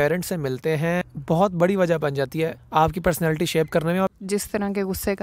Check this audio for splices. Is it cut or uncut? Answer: cut